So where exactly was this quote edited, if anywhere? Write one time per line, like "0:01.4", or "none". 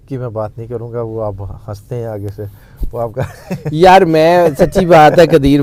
none